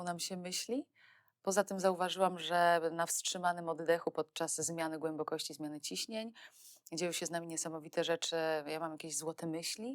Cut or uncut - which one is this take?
uncut